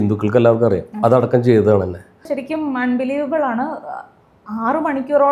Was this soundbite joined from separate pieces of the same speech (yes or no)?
yes